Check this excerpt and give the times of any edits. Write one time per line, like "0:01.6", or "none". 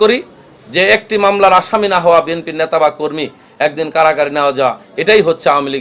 none